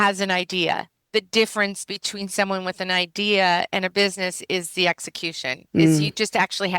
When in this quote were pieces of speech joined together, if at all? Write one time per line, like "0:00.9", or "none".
0:00.9